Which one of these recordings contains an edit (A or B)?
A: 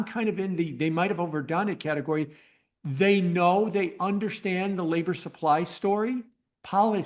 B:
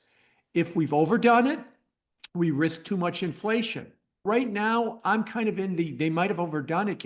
B